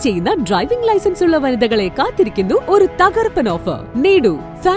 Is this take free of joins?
no; 2 cuts; at 2.6 s, 3.9 s

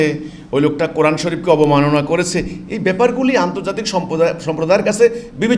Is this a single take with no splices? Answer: yes; 0 cuts

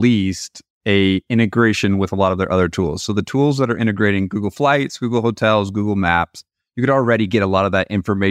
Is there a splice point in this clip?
no; 0 cuts

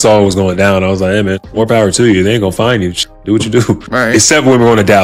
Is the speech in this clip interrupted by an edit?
no; 0 cuts

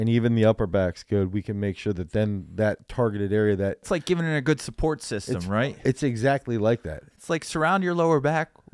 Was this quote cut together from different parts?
yes; 2 cuts; at 3.9 s, 5.7 s

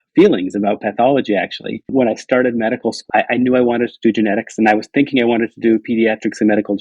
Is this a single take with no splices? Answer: no; 2 cuts; at 1.9 s, 3.1 s

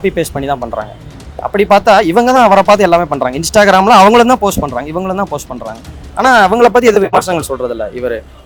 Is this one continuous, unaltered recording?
yes; 0 cuts

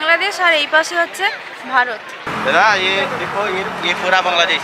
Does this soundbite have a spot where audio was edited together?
yes; 1 cut; at 2.3 s

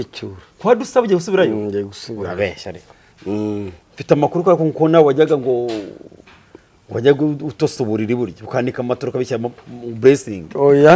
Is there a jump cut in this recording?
no; 0 cuts

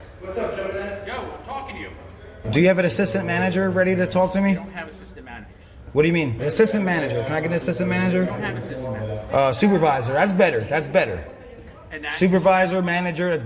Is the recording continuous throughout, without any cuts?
no; 3 cuts; at 2.4 s, 6.4 s, 9.2 s

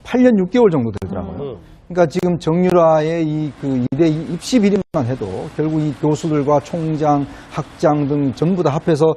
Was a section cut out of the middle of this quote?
yes; 1 cut; at 5.8 s

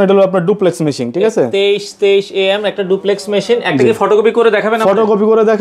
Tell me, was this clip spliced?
no; 0 cuts

